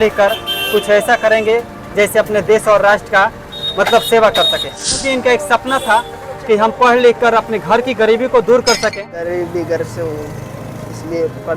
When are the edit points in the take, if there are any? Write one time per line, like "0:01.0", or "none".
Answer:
0:05.0
0:08.7